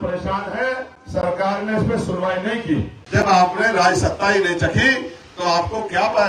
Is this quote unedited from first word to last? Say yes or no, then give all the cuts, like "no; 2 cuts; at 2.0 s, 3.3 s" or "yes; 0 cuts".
no; 2 cuts; at 0.9 s, 3.0 s